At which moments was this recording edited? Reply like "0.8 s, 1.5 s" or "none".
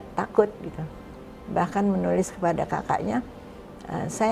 1.1 s

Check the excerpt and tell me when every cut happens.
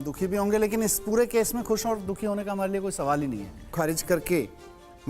3.7 s

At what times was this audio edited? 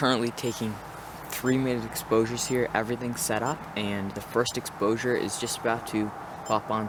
none

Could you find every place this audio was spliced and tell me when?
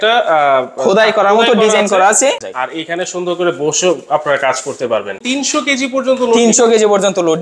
2.4 s, 5.2 s

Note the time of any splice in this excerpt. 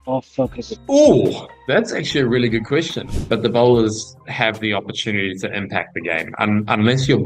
3.0 s

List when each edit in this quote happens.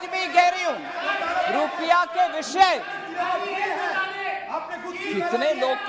none

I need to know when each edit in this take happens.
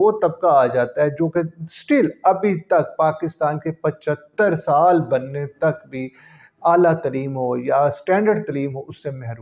none

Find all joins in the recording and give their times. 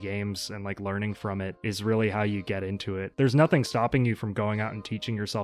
1.6 s, 3.1 s

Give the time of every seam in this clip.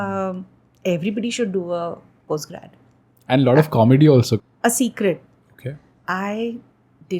4.4 s

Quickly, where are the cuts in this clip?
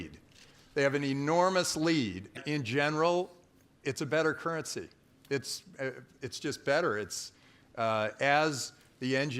2.4 s

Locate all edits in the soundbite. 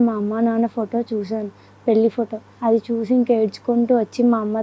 2.4 s

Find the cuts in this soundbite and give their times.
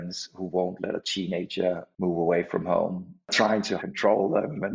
1.9 s, 3.4 s

